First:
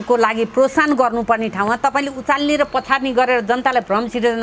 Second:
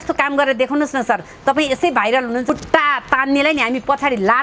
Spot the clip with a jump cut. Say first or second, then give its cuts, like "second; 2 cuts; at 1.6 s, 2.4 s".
second; 1 cut; at 2.5 s